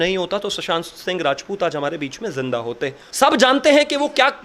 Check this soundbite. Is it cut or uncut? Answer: cut